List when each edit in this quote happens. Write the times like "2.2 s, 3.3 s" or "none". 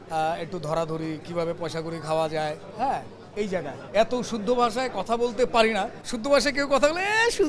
3.8 s, 6.0 s